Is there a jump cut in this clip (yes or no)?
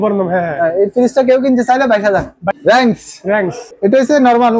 yes